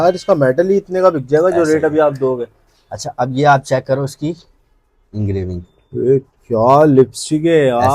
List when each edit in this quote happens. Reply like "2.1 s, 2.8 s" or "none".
none